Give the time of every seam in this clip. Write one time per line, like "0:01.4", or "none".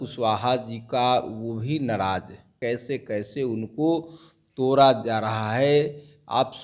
0:02.5